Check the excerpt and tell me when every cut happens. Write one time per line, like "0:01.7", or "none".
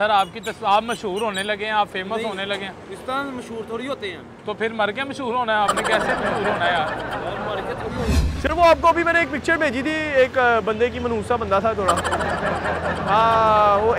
0:08.3